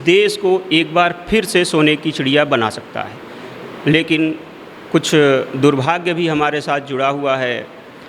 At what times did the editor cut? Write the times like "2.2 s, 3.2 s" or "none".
none

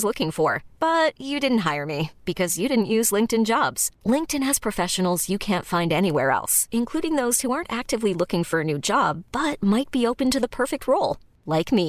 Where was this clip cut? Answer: none

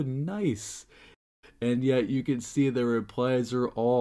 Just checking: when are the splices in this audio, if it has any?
1.1 s

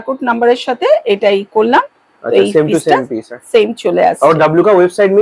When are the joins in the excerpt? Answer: none

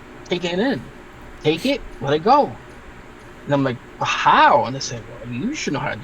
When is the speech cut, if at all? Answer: none

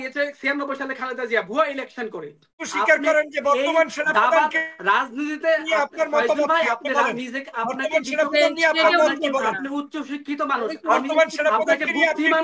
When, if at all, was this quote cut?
2.6 s

